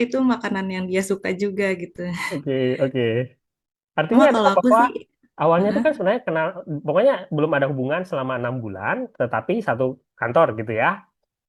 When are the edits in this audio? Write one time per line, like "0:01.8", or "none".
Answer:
none